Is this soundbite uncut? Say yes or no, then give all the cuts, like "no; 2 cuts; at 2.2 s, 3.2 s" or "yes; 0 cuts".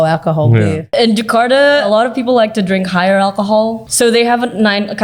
no; 3 cuts; at 0.8 s, 1.8 s, 3.8 s